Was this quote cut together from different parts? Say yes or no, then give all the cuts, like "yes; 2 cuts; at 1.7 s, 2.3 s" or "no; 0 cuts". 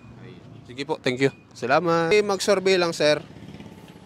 yes; 1 cut; at 2.1 s